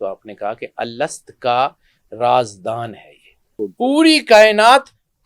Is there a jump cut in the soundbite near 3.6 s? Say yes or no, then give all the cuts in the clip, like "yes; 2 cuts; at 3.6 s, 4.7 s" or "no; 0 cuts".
yes; 1 cut; at 3.6 s